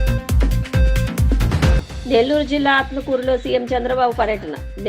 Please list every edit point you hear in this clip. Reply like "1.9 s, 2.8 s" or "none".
1.7 s